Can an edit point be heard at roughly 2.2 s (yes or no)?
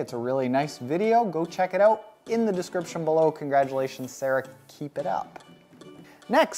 no